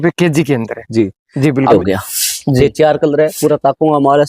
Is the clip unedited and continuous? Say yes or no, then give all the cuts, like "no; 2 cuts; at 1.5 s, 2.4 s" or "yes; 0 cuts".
no; 1 cut; at 1.7 s